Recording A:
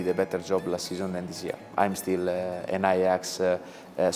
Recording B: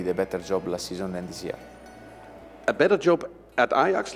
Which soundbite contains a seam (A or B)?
A